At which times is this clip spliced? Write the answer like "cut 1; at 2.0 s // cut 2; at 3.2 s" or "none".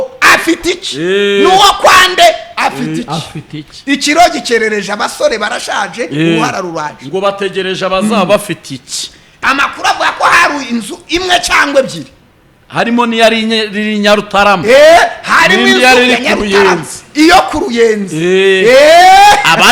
cut 1; at 9.4 s